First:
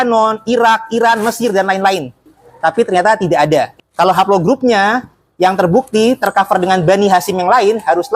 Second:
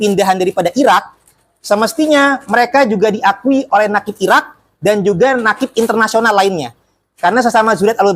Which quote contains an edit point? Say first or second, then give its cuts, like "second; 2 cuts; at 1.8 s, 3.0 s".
first; 2 cuts; at 2.4 s, 3.7 s